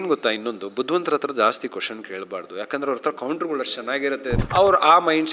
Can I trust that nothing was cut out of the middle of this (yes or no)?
no